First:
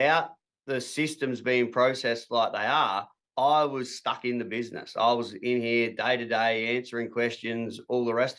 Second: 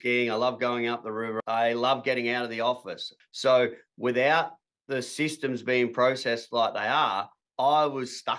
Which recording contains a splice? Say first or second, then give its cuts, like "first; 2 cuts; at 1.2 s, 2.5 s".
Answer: second; 2 cuts; at 1.3 s, 3.1 s